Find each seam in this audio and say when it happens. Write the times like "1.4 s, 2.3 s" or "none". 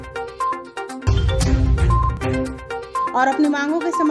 1.1 s, 3.1 s